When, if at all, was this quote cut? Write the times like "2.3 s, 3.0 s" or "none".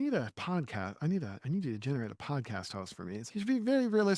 3.3 s